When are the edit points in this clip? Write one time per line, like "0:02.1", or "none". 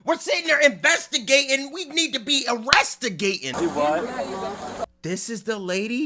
0:03.5